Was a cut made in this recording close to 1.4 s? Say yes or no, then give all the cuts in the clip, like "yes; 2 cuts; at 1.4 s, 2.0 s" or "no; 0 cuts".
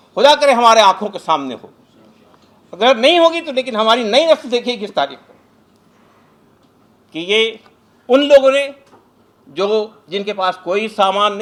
no; 0 cuts